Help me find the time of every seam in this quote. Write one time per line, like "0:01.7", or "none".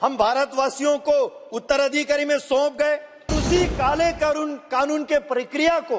0:03.4